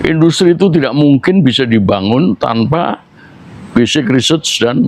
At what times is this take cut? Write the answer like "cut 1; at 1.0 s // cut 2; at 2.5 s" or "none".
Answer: none